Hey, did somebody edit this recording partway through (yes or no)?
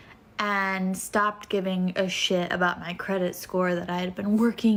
no